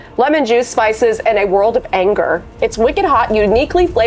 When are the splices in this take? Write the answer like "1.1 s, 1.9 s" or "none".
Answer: 2.5 s